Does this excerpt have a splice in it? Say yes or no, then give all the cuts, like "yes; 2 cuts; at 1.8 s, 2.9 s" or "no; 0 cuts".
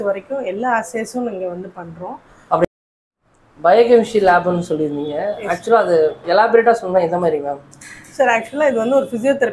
no; 0 cuts